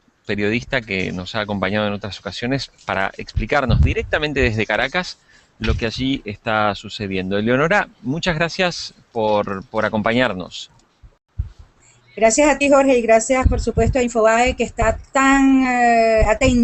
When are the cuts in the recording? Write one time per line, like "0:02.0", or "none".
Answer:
0:03.3